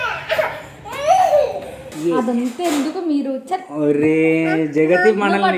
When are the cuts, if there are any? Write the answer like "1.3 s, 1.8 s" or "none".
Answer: 1.9 s